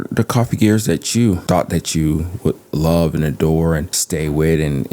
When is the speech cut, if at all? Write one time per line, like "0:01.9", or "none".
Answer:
0:01.4
0:04.0